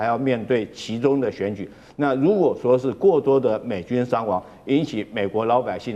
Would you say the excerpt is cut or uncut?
uncut